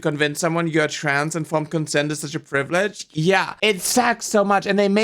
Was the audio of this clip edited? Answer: yes; 1 cut; at 3.5 s

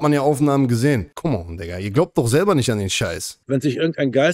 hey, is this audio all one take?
no; 2 cuts; at 1.1 s, 3.3 s

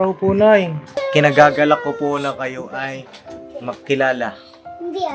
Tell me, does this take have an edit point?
yes; 1 cut; at 1.0 s

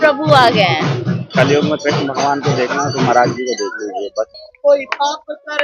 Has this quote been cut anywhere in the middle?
yes; 2 cuts; at 1.3 s, 4.3 s

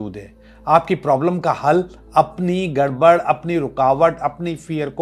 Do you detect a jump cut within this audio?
no; 0 cuts

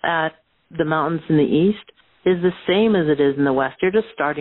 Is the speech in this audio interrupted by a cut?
no; 0 cuts

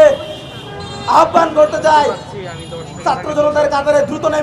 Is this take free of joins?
yes; 0 cuts

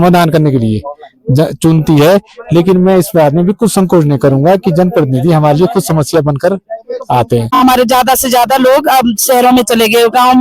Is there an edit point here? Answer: yes; 1 cut; at 7.5 s

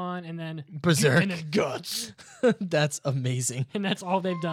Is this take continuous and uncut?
yes; 0 cuts

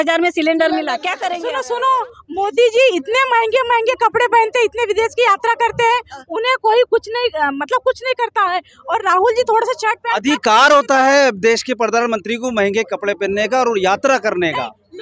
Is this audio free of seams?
no; 1 cut; at 1.3 s

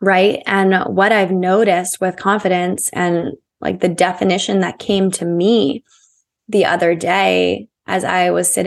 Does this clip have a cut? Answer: no; 0 cuts

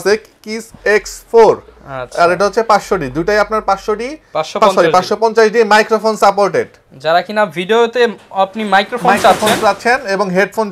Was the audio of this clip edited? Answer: no; 0 cuts

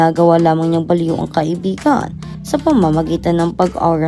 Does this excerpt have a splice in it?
no; 0 cuts

